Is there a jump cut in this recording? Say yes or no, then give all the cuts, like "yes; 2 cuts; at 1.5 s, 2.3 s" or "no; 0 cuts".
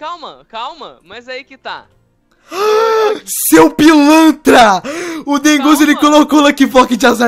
no; 0 cuts